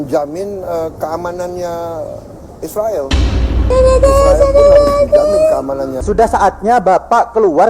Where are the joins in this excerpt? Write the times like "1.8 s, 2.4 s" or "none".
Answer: 5.9 s